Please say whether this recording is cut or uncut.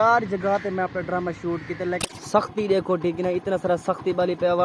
cut